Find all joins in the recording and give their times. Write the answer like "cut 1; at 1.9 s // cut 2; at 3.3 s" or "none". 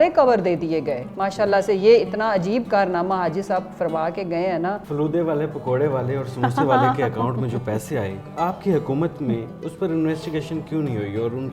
cut 1; at 1.1 s // cut 2; at 4.8 s // cut 3; at 9.6 s